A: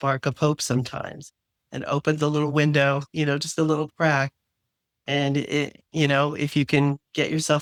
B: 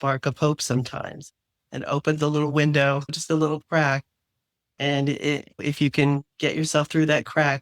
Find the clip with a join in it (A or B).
B